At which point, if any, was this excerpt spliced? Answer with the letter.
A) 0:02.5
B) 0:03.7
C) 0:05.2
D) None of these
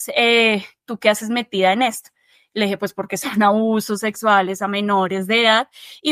D